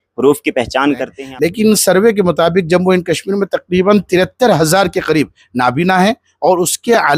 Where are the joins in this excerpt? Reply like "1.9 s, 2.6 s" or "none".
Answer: 1.4 s